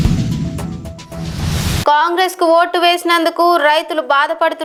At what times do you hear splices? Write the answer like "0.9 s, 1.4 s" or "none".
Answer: none